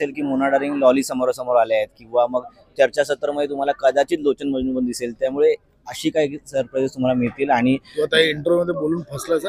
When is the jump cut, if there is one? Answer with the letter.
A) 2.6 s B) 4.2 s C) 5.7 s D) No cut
D